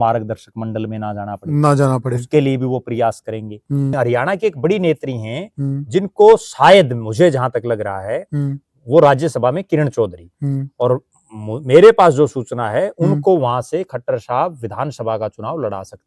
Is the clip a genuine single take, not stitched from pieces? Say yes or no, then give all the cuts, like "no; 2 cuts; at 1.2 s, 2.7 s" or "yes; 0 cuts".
no; 1 cut; at 3.9 s